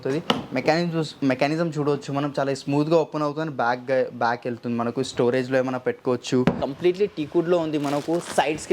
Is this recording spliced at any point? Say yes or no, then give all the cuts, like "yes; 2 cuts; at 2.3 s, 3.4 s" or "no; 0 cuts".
yes; 1 cut; at 6.6 s